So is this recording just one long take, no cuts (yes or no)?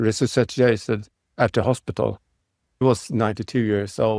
no